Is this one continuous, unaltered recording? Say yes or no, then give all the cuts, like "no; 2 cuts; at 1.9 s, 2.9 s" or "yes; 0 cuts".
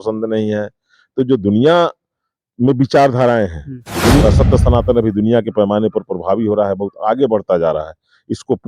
no; 1 cut; at 4.2 s